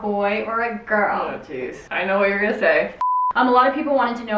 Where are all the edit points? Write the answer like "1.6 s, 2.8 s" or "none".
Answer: 3.1 s

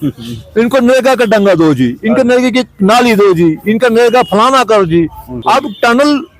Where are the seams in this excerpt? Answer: 5.4 s

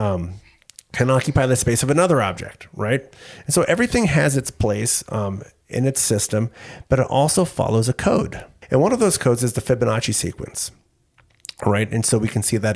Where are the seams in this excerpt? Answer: 8.5 s

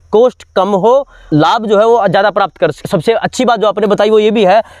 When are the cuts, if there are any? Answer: 2.8 s

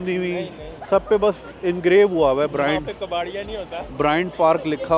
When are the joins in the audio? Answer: none

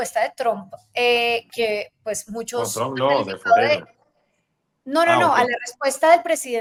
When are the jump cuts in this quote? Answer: none

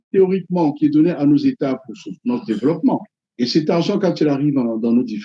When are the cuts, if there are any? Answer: 3.2 s

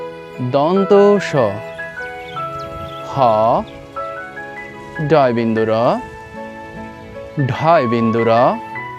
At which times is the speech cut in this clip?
1.6 s, 2.9 s

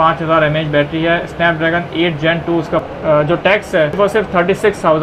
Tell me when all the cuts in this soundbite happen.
2.8 s, 4.0 s

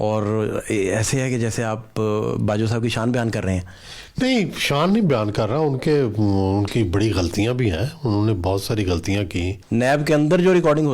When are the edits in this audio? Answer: 9.6 s

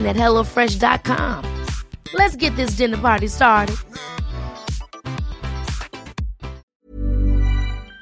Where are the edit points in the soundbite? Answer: 6.7 s

